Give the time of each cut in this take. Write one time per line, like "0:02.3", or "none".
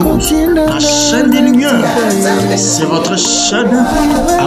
none